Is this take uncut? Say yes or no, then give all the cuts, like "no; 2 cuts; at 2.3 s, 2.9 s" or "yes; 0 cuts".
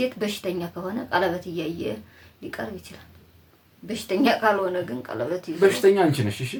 yes; 0 cuts